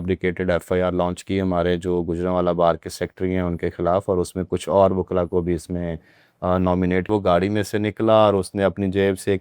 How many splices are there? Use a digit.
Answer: 1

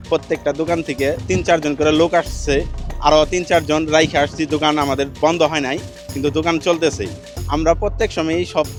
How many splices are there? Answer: 0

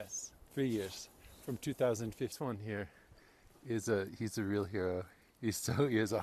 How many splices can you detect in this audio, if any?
1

